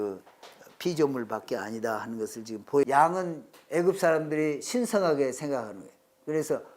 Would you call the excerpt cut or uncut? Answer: cut